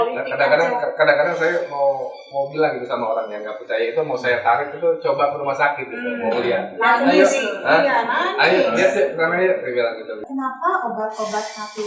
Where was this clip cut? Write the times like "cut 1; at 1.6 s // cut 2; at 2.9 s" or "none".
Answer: cut 1; at 10.2 s